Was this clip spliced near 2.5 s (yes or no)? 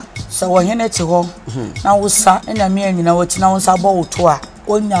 yes